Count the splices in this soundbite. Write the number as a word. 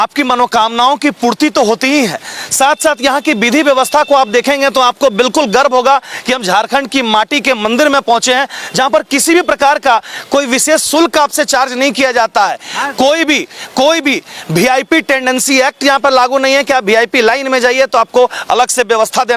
zero